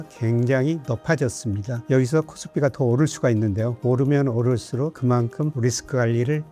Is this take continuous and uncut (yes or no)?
yes